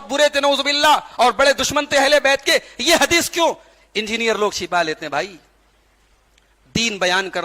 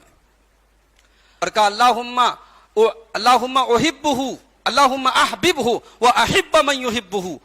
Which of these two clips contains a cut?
second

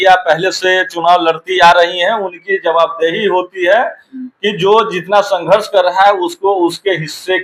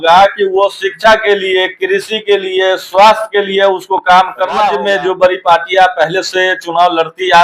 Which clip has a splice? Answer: second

